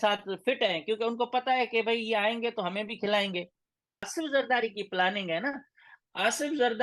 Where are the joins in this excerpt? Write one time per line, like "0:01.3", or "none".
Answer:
0:04.1